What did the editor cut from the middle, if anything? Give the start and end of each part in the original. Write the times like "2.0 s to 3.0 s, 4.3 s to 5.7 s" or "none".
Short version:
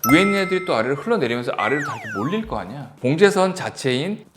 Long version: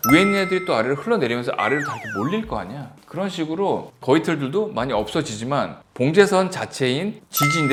2.9 s to 5.8 s